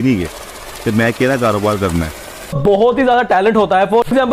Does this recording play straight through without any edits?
no; 1 cut; at 2.6 s

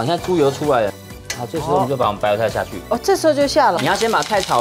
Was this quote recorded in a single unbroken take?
no; 2 cuts; at 0.9 s, 3.8 s

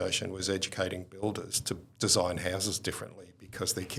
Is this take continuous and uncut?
yes; 0 cuts

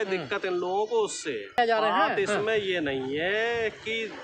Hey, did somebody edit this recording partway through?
yes; 1 cut; at 1.6 s

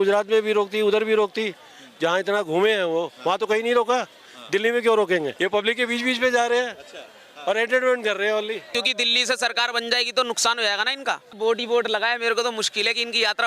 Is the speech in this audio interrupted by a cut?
yes; 3 cuts; at 5.3 s, 8.7 s, 11.3 s

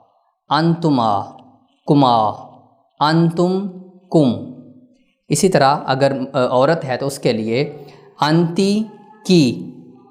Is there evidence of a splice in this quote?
no; 0 cuts

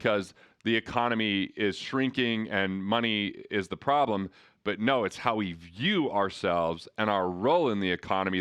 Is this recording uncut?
yes; 0 cuts

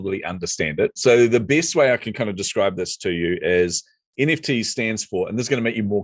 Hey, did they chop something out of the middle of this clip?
no; 0 cuts

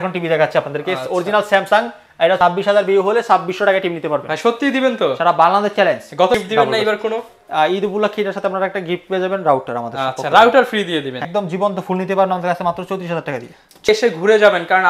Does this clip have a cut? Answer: yes; 4 cuts; at 2.4 s, 6.4 s, 11.3 s, 13.9 s

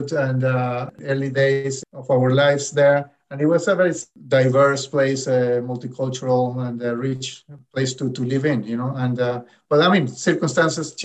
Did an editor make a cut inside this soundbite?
yes; 2 cuts; at 1.0 s, 1.9 s

